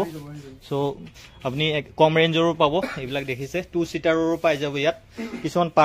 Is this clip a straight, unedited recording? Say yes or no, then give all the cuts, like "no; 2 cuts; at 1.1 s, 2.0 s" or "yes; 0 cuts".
yes; 0 cuts